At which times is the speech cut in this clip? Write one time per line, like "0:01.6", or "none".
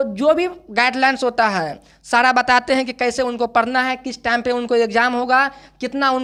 none

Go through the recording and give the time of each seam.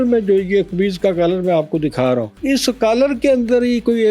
0:02.4

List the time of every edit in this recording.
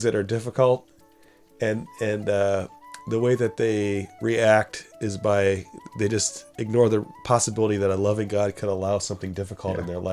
none

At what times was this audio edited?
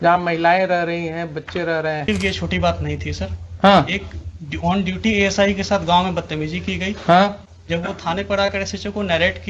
0:02.1

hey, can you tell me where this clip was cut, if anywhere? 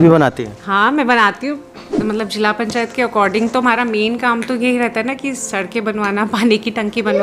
0:01.9

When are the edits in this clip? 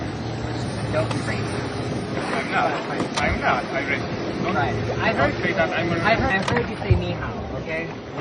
none

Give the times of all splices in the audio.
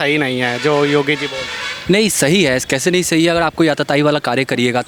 none

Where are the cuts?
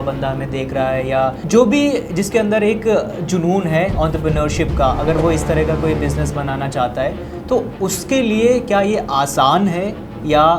0:01.4

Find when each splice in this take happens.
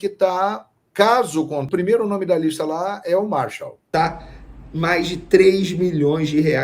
0:01.7
0:03.8

